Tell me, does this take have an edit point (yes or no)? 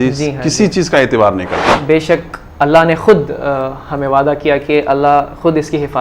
yes